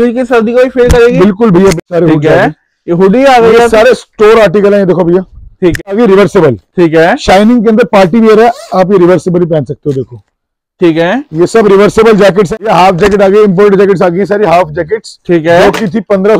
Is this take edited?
yes; 3 cuts; at 1.8 s, 5.9 s, 12.5 s

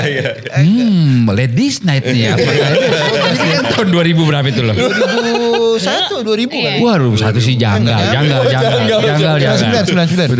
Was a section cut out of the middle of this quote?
no; 0 cuts

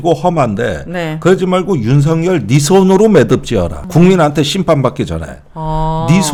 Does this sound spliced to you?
no; 0 cuts

